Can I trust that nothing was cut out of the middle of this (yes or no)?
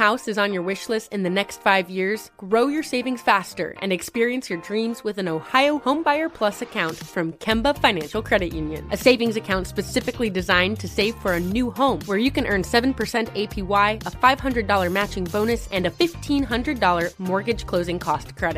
yes